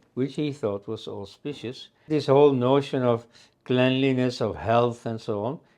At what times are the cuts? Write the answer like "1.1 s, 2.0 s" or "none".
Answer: 2.1 s